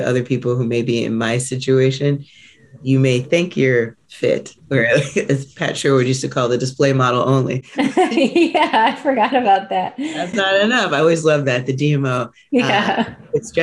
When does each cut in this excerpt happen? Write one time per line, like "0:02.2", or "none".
0:04.6